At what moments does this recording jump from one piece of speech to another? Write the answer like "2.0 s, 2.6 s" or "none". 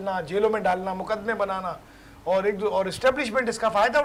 none